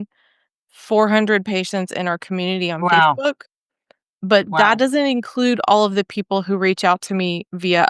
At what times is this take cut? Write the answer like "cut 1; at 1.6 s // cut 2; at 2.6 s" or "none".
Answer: none